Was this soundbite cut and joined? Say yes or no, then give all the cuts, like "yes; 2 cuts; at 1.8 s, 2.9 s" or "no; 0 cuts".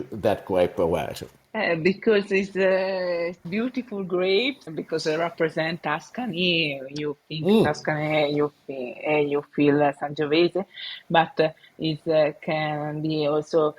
yes; 2 cuts; at 3.4 s, 4.7 s